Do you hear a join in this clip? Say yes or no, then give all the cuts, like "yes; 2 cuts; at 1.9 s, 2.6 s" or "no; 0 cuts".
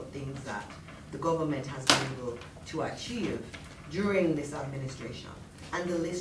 no; 0 cuts